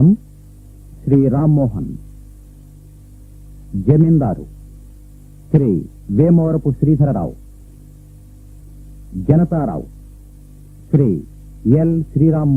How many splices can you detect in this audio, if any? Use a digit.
0